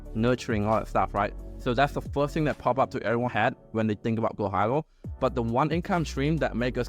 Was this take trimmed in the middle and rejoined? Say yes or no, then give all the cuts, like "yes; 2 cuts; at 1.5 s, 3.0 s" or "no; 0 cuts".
no; 0 cuts